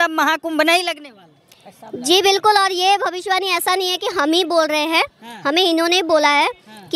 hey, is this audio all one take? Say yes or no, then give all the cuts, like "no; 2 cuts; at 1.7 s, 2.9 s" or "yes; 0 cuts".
yes; 0 cuts